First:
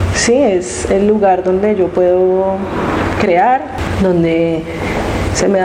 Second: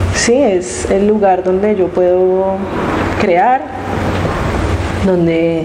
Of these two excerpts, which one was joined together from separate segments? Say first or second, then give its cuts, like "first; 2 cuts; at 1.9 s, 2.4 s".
first; 1 cut; at 3.8 s